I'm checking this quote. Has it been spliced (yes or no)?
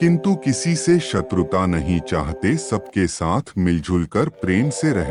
no